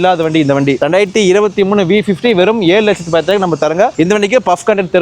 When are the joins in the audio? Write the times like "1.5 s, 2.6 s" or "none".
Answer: 3.9 s